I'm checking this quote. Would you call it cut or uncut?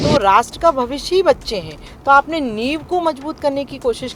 uncut